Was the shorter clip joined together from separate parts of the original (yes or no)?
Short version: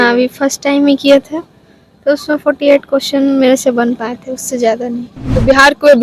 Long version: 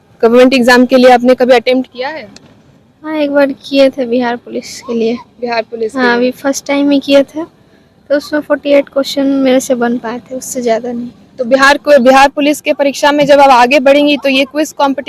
no